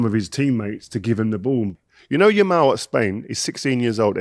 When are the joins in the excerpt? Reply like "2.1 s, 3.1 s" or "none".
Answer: 1.7 s